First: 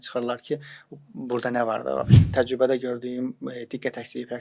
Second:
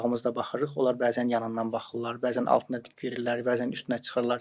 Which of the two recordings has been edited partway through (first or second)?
first